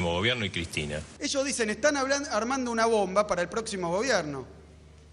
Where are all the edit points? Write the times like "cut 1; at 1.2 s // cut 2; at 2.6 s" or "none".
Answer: cut 1; at 1.1 s